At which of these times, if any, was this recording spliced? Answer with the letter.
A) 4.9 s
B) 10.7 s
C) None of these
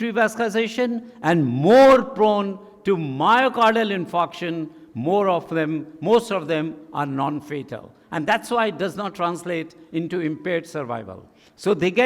C